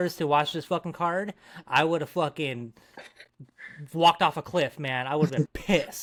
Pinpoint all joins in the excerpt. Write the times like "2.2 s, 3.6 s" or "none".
none